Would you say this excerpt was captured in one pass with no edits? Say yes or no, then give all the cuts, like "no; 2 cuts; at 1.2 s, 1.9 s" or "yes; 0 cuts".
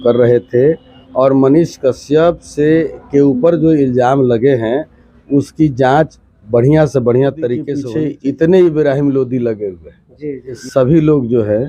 no; 2 cuts; at 7.8 s, 10.6 s